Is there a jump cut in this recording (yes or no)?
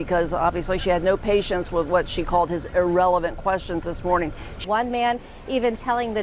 yes